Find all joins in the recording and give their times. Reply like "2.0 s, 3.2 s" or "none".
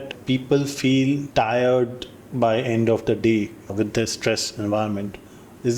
1.2 s